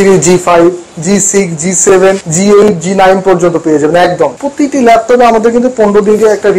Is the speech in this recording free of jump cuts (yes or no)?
no